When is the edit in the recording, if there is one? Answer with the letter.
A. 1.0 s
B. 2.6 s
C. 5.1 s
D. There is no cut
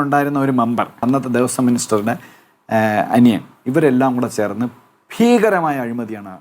A